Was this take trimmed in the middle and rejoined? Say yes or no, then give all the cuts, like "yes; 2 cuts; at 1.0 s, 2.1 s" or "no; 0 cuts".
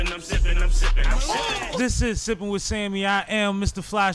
yes; 1 cut; at 1.8 s